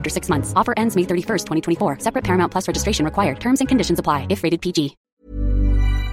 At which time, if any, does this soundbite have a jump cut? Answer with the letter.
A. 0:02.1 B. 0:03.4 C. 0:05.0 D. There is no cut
C